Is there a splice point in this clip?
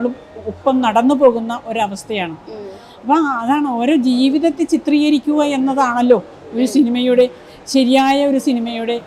no; 0 cuts

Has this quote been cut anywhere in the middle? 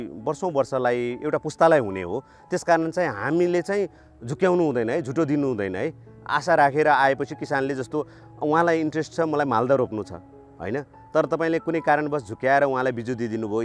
no; 0 cuts

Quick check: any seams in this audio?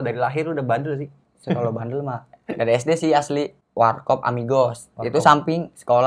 yes; 1 cut; at 3.6 s

